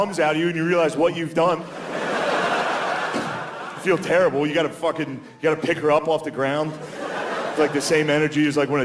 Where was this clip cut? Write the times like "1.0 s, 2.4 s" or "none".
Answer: none